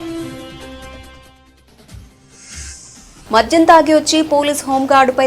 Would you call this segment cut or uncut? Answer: cut